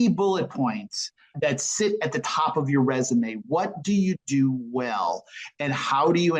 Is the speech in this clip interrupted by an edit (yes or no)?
no